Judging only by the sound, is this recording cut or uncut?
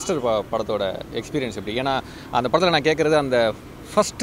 uncut